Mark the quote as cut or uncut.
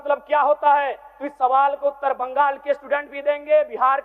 uncut